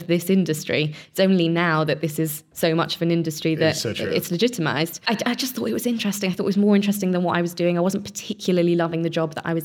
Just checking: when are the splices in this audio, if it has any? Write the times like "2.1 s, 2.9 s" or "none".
5.0 s